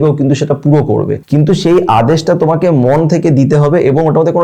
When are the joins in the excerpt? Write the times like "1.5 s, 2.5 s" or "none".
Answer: 1.2 s